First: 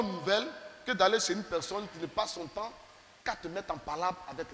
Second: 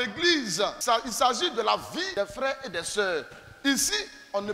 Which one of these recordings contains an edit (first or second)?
second